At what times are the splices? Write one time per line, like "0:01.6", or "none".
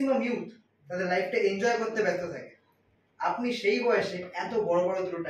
none